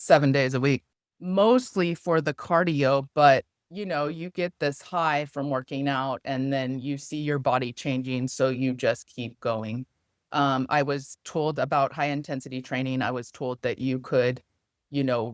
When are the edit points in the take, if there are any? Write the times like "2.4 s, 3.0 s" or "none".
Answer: 1.0 s